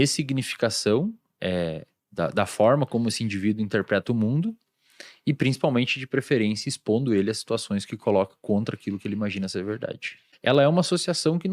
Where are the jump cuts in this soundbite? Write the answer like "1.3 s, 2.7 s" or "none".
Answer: 10.2 s